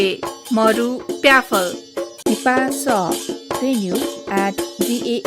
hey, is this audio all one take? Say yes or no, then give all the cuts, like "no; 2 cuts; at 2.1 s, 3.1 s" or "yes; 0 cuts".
no; 1 cut; at 2.1 s